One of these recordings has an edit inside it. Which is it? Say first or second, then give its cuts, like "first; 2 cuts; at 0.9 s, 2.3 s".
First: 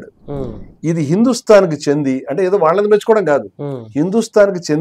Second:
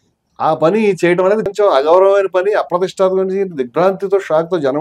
second; 1 cut; at 1.4 s